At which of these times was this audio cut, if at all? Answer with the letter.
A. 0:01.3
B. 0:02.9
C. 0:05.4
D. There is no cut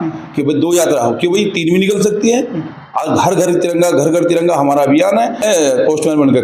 C